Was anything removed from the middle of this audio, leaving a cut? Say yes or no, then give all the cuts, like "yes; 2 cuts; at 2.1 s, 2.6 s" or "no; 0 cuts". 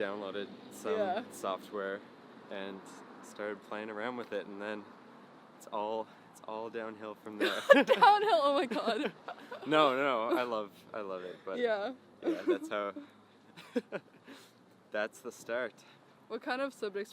no; 0 cuts